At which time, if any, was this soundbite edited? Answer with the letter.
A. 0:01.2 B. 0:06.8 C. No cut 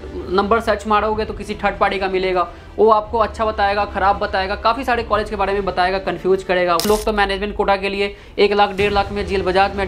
B